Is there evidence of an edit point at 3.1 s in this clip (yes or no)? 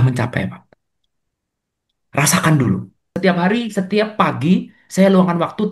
yes